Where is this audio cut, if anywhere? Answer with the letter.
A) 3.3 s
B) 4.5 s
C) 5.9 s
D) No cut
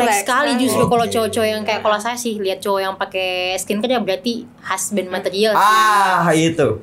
D